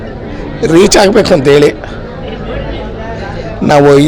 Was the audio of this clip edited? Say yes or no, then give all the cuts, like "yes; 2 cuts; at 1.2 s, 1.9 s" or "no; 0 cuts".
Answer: no; 0 cuts